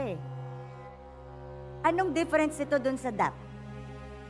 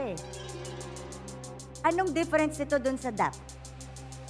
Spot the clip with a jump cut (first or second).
second